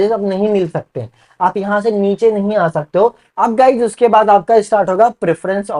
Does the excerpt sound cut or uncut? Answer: cut